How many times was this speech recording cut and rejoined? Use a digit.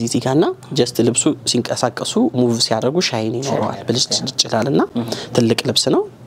0